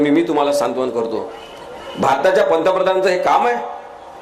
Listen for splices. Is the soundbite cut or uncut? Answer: uncut